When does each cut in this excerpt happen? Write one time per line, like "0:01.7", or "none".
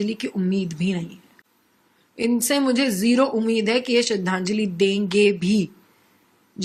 none